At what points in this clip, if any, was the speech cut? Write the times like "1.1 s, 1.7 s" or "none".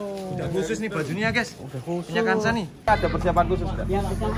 2.9 s